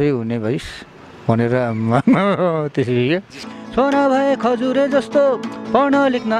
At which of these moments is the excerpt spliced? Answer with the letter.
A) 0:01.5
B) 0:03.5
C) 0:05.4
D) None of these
B